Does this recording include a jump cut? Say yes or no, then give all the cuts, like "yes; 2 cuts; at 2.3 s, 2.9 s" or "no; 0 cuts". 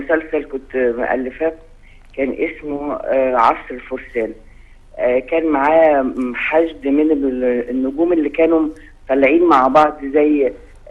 yes; 1 cut; at 1.8 s